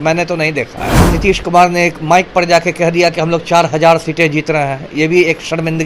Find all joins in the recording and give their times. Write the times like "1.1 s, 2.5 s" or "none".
1.0 s